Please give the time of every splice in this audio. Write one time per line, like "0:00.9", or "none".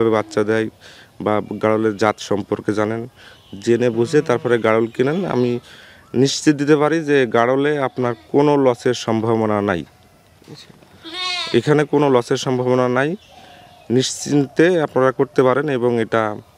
none